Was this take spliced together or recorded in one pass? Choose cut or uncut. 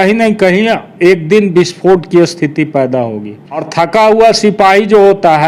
cut